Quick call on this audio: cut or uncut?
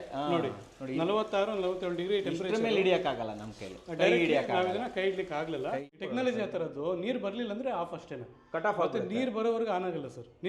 cut